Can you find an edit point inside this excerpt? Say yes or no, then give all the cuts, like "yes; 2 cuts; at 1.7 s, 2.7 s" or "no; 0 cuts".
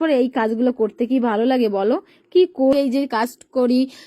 yes; 1 cut; at 2.7 s